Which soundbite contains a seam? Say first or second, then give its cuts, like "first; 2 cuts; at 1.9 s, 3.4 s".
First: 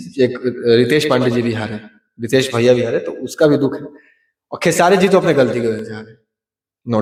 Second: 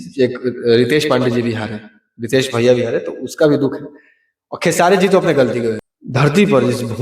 second; 1 cut; at 5.9 s